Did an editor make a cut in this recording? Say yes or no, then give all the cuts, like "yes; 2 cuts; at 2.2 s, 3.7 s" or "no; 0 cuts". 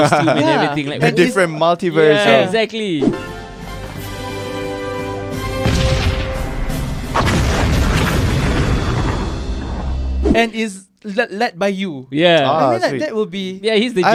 no; 0 cuts